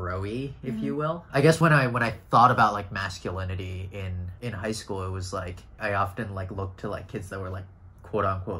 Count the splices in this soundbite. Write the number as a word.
three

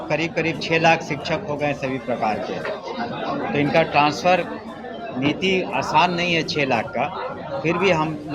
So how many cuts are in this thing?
zero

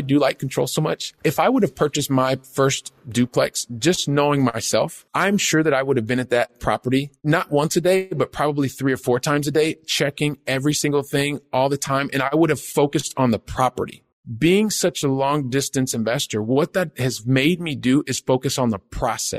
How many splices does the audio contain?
one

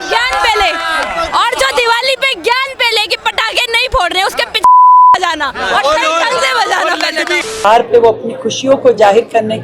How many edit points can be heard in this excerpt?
one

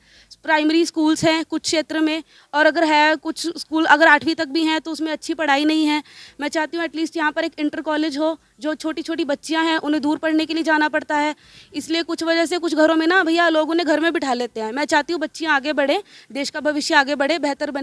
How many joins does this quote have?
zero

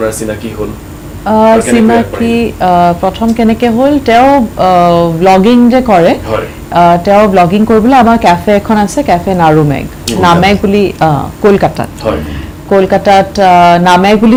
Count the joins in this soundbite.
zero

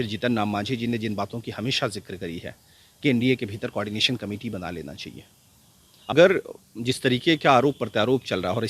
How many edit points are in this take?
one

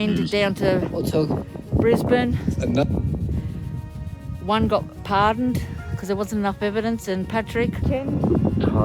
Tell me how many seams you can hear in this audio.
one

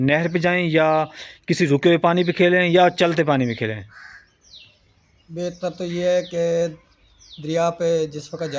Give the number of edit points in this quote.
zero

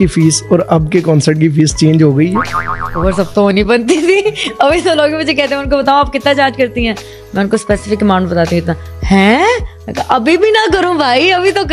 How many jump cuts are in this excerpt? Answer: zero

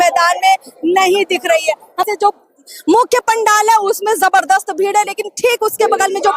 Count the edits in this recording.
one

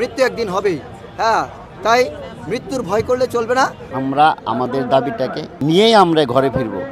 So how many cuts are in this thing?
two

